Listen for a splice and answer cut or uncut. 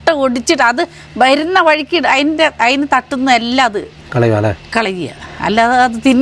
uncut